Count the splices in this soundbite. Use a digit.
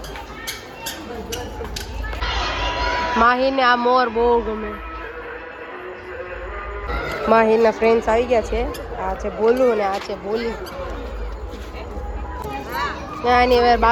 0